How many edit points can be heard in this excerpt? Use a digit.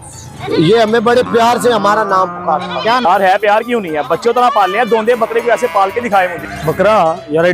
1